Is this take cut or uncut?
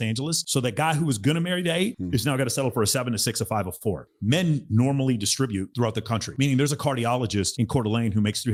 uncut